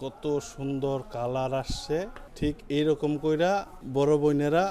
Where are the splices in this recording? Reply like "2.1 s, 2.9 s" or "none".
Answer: 2.2 s, 3.8 s